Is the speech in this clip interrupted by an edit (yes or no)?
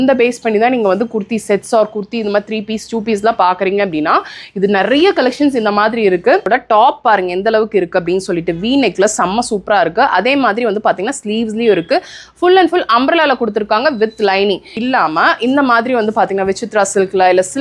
yes